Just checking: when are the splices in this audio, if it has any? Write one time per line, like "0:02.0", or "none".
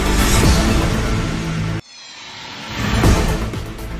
none